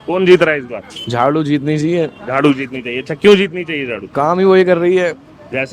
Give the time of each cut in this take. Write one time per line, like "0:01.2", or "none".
none